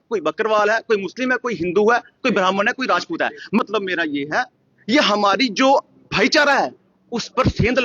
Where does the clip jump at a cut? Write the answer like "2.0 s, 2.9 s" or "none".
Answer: 3.6 s